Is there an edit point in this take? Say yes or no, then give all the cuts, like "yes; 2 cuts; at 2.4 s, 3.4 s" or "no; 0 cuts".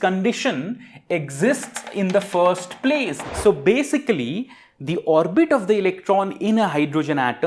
yes; 1 cut; at 3.2 s